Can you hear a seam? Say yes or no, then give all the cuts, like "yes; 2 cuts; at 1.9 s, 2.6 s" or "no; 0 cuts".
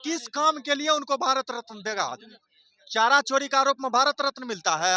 no; 0 cuts